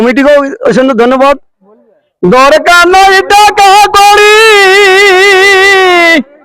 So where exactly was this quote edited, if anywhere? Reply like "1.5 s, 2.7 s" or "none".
1.6 s

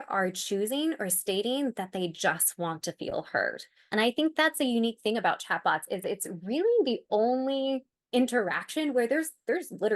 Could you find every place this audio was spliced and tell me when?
3.8 s

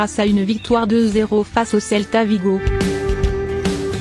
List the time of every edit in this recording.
2.6 s

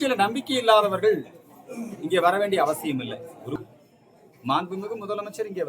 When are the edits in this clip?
3.6 s

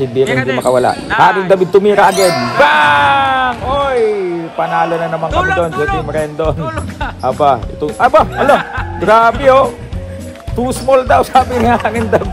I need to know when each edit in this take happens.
none

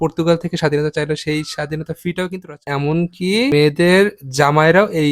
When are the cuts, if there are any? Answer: 2.7 s

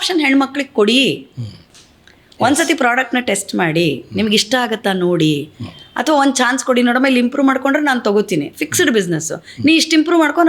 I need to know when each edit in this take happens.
none

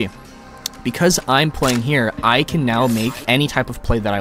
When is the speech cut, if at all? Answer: 3.2 s

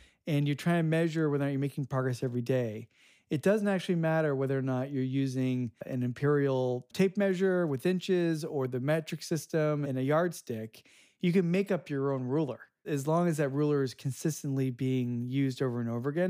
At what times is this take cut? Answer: 12.8 s

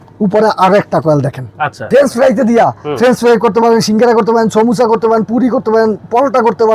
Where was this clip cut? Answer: 1.8 s

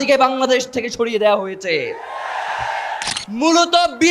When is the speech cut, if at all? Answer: 3.0 s

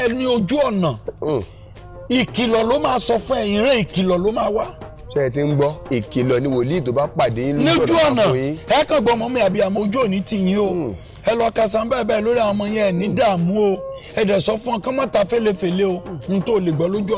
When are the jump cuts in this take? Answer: none

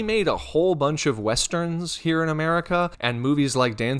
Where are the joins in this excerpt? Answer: 3.0 s

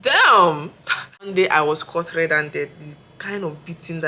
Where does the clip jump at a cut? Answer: 1.3 s

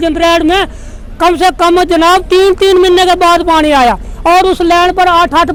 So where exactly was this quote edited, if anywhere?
none

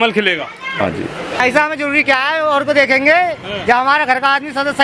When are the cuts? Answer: 1.4 s

